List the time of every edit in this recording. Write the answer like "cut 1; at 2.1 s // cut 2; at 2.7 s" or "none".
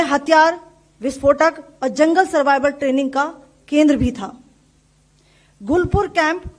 none